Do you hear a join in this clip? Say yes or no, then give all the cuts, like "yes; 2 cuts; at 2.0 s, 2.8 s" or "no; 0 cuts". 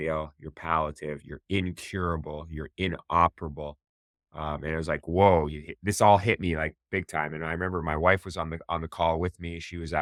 no; 0 cuts